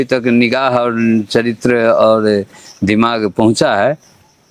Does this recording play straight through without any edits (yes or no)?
yes